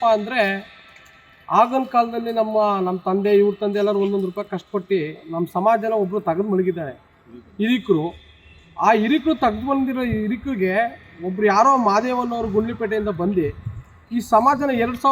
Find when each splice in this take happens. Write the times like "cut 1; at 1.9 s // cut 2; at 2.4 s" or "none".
none